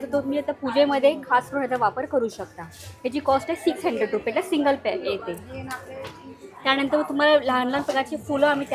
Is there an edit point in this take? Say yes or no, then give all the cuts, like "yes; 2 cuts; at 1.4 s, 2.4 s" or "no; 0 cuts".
no; 0 cuts